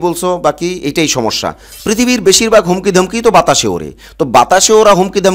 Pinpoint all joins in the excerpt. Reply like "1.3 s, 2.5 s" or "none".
1.7 s